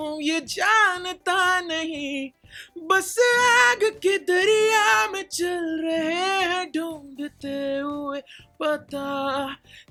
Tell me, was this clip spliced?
no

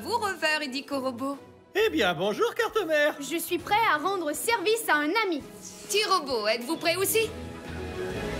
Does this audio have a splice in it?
yes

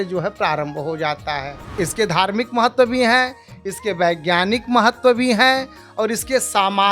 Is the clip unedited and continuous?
no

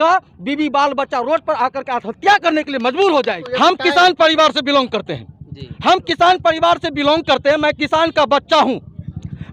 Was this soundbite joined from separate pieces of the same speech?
yes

